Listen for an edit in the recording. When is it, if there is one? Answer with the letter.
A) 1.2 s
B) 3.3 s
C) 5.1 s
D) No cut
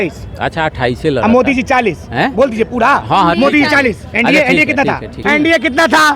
C